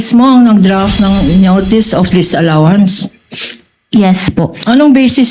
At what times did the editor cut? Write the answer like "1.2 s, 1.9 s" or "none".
none